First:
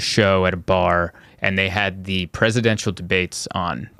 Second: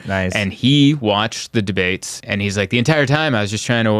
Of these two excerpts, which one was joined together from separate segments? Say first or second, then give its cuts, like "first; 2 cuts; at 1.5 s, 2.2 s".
second; 1 cut; at 2.2 s